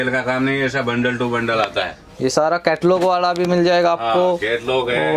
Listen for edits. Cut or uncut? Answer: uncut